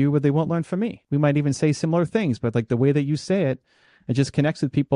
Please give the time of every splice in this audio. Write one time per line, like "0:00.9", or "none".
0:01.0